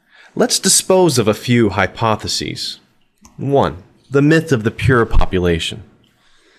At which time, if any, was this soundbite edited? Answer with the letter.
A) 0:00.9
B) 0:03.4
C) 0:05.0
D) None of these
D